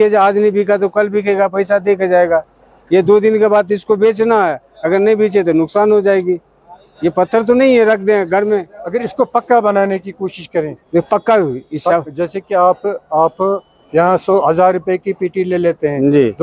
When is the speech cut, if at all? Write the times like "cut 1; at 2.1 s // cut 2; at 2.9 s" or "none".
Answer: none